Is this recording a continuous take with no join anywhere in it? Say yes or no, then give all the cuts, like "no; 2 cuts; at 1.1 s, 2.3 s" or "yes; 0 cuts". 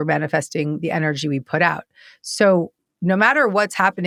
yes; 0 cuts